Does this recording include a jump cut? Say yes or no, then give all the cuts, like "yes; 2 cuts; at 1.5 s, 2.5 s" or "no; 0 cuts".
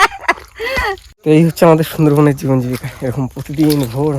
yes; 1 cut; at 1.1 s